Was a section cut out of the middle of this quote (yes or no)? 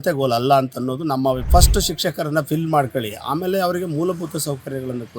yes